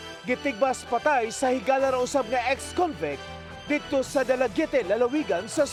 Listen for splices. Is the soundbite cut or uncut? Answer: uncut